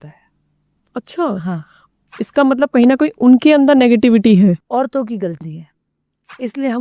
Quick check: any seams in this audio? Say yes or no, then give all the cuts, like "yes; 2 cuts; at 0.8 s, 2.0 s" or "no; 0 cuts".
yes; 1 cut; at 4.6 s